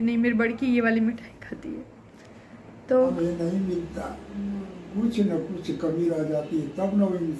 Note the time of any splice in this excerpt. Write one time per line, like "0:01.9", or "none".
0:03.1